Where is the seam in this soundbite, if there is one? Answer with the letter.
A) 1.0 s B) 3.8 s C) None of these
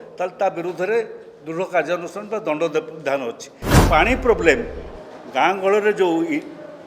B